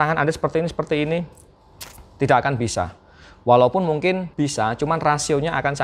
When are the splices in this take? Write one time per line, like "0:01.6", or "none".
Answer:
none